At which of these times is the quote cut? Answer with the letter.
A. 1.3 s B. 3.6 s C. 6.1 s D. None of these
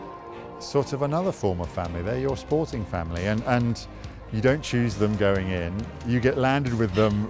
C